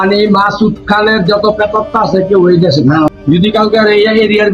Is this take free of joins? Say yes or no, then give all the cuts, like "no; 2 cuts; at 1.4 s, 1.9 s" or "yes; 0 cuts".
no; 1 cut; at 3.1 s